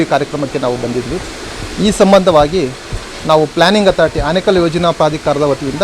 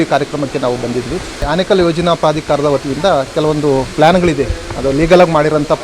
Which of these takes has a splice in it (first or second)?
second